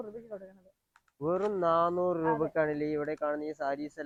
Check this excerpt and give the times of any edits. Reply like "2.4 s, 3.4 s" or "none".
none